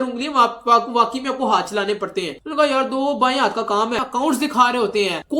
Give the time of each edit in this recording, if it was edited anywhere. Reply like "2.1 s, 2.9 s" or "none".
4.0 s